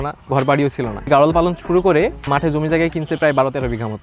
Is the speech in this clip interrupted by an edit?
yes; 2 cuts; at 1.1 s, 2.3 s

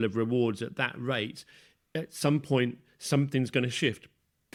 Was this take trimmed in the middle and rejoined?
no; 0 cuts

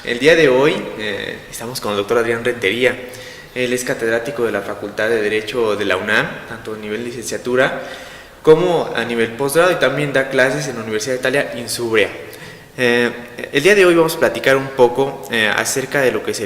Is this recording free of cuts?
no; 1 cut; at 6.5 s

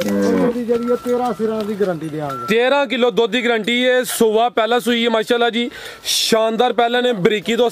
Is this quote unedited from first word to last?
yes; 0 cuts

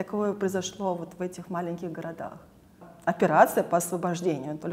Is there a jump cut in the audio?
yes; 1 cut; at 2.9 s

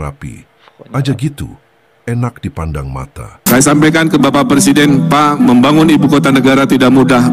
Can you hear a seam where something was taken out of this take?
yes; 1 cut; at 3.5 s

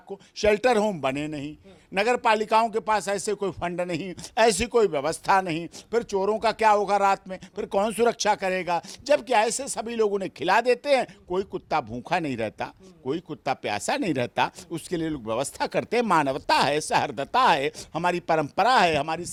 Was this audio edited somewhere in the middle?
no; 0 cuts

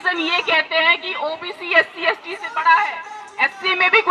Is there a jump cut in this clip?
no; 0 cuts

